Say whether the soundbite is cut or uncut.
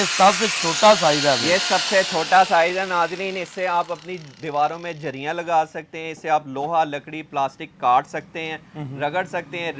uncut